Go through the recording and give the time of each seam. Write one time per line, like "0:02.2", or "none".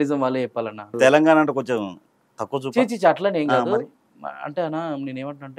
0:01.0

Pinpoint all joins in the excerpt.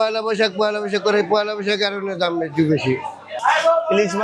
0:03.2

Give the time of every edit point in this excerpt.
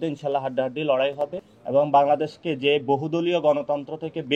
none

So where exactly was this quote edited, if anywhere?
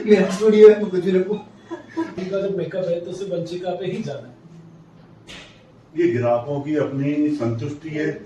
0:02.2

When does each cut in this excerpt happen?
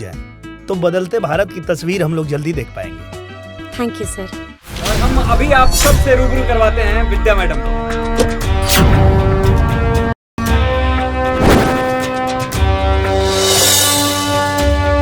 0:04.9

